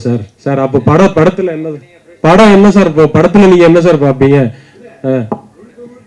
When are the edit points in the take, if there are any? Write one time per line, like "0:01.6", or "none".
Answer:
none